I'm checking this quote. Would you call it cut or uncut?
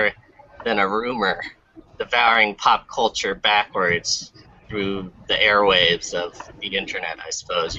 uncut